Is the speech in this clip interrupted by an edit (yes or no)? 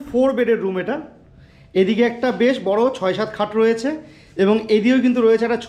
no